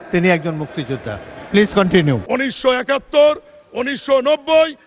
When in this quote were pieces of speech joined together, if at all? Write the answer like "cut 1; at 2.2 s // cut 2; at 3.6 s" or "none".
cut 1; at 2.2 s